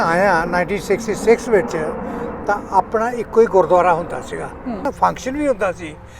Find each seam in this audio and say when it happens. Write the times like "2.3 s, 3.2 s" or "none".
4.9 s